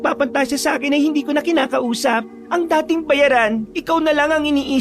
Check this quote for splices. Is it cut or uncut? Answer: cut